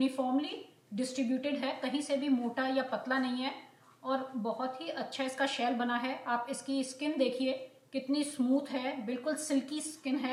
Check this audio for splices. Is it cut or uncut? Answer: uncut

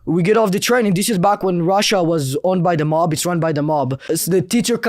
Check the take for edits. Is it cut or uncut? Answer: cut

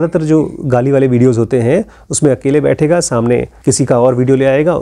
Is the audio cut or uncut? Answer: cut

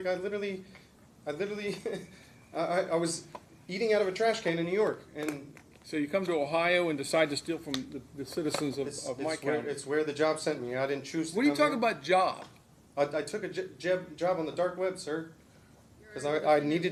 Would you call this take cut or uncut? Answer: uncut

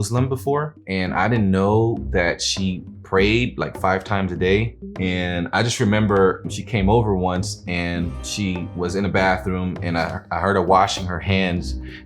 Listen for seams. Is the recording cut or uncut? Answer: cut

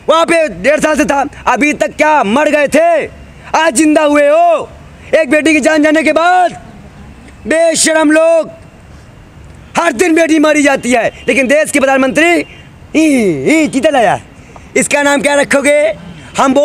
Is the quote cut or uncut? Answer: uncut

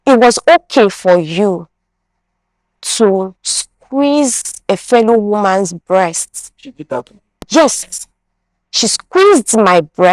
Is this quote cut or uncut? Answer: uncut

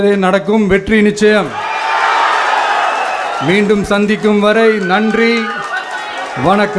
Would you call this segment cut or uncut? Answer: uncut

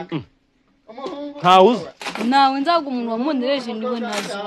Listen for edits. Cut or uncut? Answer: uncut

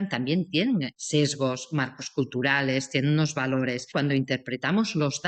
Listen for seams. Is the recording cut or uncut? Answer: cut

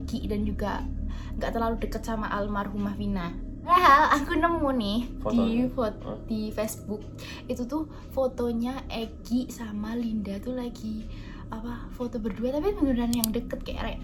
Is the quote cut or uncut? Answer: uncut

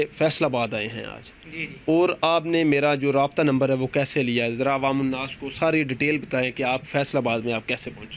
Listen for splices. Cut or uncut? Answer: uncut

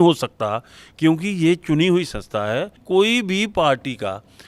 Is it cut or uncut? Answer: cut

